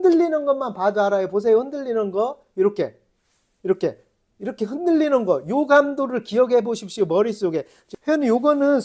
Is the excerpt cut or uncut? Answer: cut